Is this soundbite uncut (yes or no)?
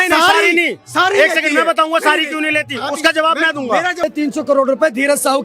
no